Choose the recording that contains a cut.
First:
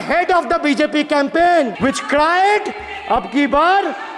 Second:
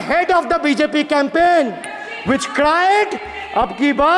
first; 1 cut; at 1.7 s

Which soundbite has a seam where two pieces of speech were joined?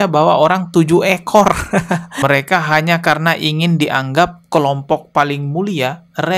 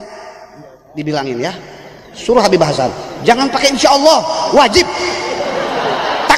first; 1 cut; at 2.1 s

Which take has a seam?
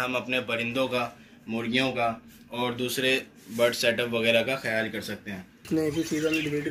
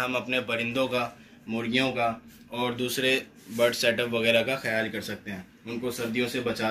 first; 1 cut; at 5.5 s

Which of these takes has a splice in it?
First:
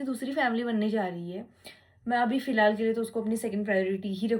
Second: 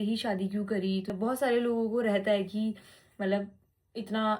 second; 1 cut; at 1.1 s

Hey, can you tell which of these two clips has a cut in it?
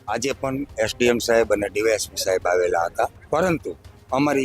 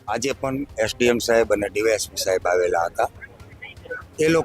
first; 1 cut; at 3.2 s

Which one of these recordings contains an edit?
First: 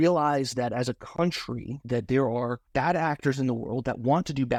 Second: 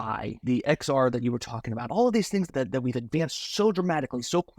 second; 1 cut; at 2.5 s

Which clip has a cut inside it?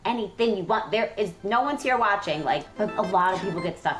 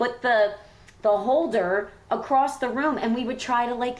first; 1 cut; at 2.7 s

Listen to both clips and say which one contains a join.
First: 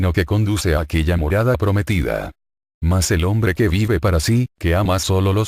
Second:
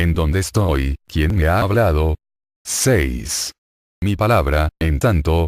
first; 1 cut; at 1.4 s

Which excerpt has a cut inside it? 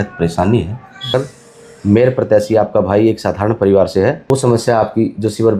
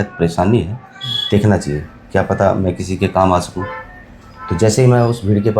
first; 2 cuts; at 1.1 s, 4.2 s

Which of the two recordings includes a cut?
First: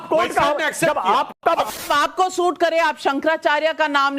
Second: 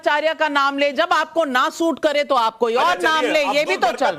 first; 1 cut; at 1.7 s

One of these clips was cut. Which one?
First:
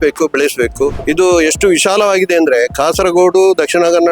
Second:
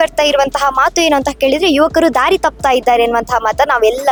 first; 1 cut; at 1.0 s

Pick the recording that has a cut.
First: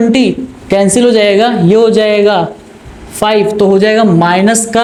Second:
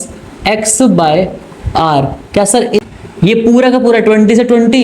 second; 1 cut; at 2.9 s

